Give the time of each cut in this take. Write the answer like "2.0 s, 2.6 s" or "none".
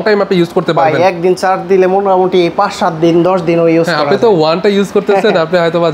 none